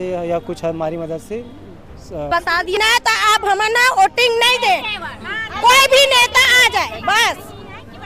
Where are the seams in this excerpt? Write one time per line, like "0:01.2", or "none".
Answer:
0:02.3